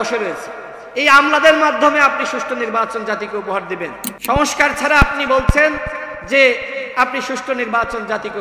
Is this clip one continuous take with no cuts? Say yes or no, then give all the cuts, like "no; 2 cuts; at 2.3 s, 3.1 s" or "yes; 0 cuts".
no; 1 cut; at 4.1 s